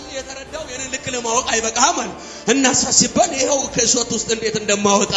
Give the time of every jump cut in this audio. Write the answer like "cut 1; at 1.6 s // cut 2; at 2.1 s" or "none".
none